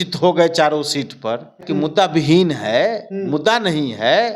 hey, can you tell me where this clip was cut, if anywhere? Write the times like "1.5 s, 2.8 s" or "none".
1.6 s